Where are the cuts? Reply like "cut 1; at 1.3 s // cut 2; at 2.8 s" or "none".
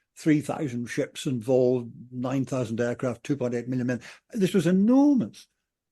none